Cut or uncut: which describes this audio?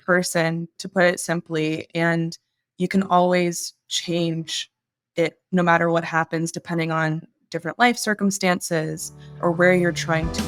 uncut